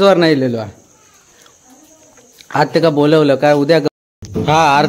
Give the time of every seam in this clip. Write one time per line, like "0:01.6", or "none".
0:03.9